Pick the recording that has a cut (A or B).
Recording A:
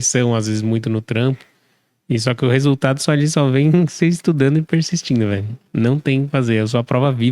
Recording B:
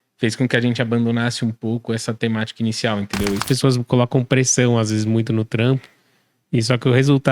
B